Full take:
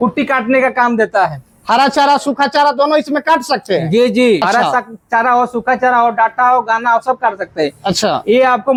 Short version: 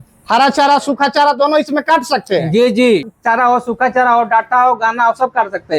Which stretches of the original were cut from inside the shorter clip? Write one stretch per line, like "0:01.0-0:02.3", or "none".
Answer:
0:04.4-0:04.9